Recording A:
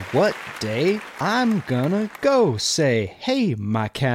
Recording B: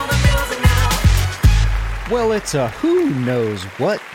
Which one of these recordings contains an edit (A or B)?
B